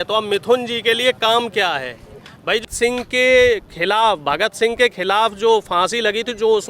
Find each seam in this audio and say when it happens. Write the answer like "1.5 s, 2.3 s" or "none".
2.6 s